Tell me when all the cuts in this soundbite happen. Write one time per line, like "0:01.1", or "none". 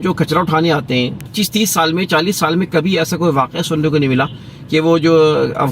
none